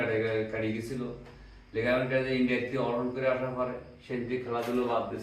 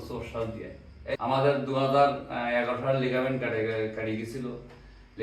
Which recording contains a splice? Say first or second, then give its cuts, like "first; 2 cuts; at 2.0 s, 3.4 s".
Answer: second; 1 cut; at 1.2 s